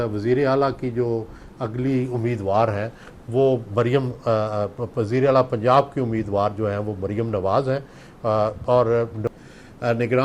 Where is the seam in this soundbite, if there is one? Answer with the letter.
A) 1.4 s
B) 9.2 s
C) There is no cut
B